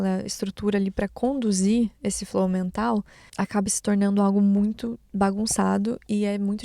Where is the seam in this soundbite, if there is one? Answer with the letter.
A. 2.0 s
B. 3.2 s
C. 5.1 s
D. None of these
B